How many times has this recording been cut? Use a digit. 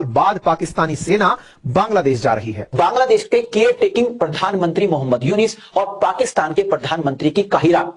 1